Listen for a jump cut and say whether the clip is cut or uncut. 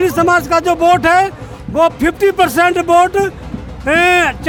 uncut